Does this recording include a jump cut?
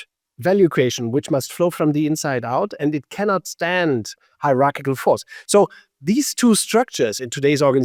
no; 0 cuts

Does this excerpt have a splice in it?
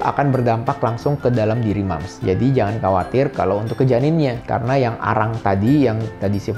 no; 0 cuts

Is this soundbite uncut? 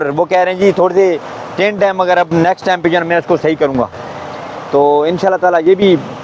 yes; 0 cuts

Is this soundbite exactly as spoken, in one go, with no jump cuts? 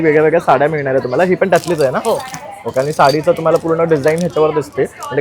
yes; 0 cuts

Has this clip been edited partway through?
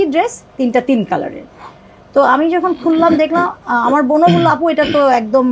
no; 0 cuts

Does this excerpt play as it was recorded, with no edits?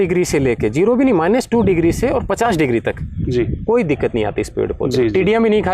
yes; 0 cuts

